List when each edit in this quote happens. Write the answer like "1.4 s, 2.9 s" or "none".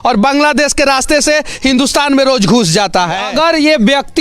3.3 s